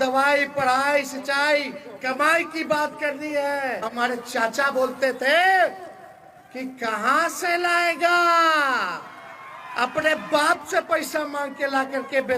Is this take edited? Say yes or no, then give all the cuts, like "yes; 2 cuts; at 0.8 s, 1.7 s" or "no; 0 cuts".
yes; 1 cut; at 3.9 s